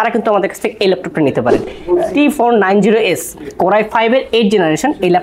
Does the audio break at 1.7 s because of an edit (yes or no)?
yes